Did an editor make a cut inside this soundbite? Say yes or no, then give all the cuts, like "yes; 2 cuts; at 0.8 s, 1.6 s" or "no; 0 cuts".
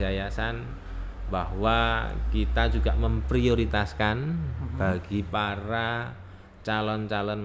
no; 0 cuts